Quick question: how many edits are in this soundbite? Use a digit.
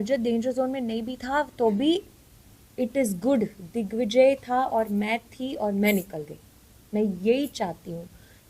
0